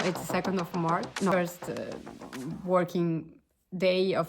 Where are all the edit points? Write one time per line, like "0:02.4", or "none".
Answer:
0:01.3